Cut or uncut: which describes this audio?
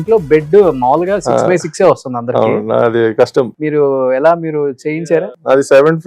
cut